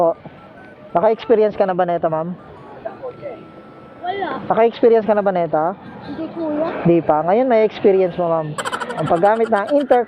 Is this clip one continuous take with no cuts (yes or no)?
yes